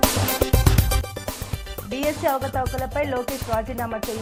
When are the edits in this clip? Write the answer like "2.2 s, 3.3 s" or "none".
none